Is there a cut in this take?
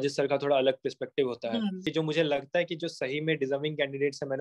yes; 1 cut; at 1.8 s

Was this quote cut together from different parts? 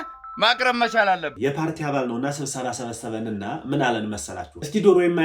yes; 1 cut; at 1.3 s

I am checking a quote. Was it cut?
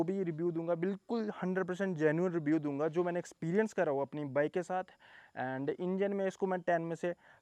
no; 0 cuts

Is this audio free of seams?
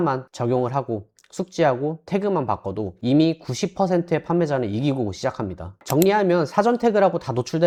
yes; 0 cuts

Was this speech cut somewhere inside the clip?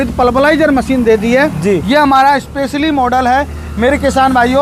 no; 0 cuts

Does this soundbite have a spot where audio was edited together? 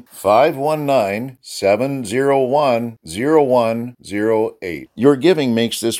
no; 0 cuts

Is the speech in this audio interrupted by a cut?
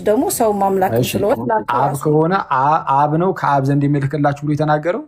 no; 0 cuts

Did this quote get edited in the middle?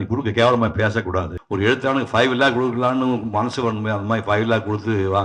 yes; 1 cut; at 1.4 s

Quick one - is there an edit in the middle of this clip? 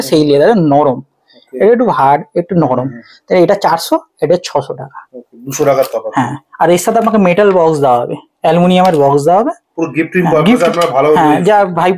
no; 0 cuts

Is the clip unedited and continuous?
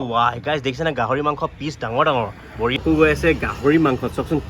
no; 1 cut; at 2.8 s

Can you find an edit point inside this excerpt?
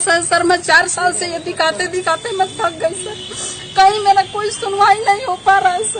no; 0 cuts

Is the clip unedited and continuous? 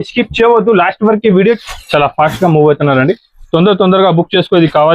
no; 1 cut; at 1.6 s

